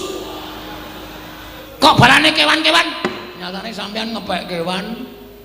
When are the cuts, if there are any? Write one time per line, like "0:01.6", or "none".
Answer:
0:01.6